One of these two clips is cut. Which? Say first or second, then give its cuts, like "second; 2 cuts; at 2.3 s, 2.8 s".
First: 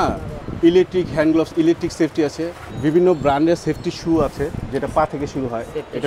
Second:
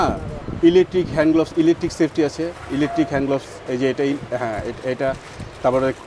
first; 1 cut; at 2.6 s